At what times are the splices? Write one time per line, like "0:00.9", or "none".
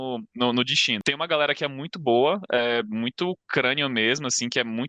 0:01.0